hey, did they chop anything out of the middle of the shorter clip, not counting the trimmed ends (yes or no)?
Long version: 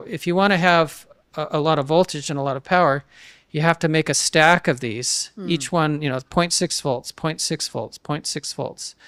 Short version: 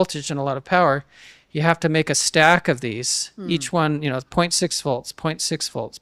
no